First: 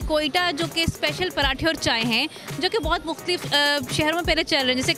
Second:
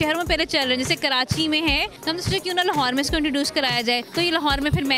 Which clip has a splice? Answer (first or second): second